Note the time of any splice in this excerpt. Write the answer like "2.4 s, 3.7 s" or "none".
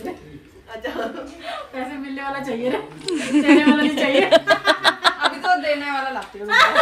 none